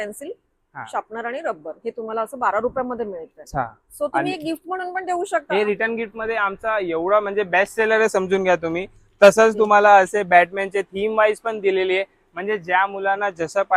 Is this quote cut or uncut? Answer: uncut